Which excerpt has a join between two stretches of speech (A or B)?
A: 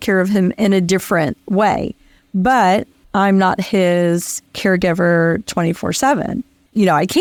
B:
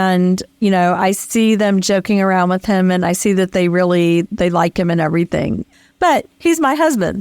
B